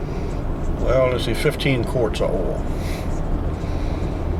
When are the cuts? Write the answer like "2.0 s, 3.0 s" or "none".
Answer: none